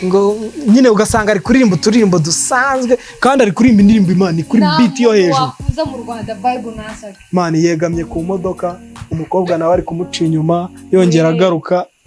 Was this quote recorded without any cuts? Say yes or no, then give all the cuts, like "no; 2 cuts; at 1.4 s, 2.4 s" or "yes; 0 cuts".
yes; 0 cuts